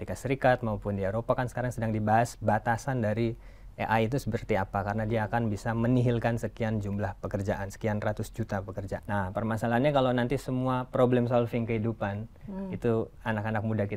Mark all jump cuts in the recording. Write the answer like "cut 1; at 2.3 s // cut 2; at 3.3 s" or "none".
cut 1; at 9.0 s